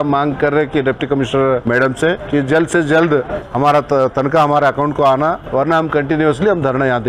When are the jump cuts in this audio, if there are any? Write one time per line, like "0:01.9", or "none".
0:01.9
0:03.4
0:05.4